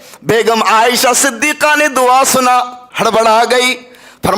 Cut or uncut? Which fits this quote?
cut